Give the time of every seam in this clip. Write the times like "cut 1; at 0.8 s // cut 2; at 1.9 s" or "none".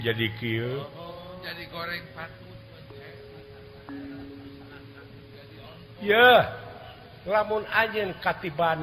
none